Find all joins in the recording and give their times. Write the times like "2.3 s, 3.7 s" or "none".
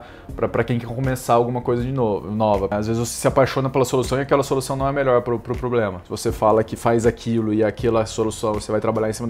2.7 s, 6.0 s